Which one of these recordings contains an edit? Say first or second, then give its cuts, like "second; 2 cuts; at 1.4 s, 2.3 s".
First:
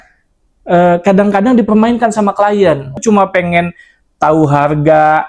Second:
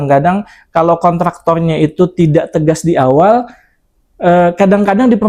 first; 1 cut; at 3.0 s